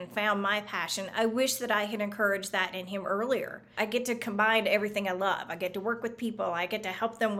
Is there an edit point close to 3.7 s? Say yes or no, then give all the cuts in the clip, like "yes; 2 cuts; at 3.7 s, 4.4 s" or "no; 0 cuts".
yes; 1 cut; at 3.7 s